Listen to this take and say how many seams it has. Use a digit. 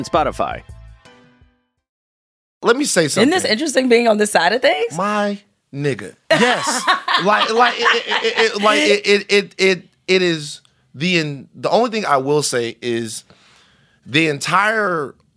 1